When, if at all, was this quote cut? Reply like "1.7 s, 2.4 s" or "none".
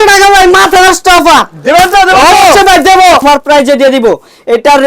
3.2 s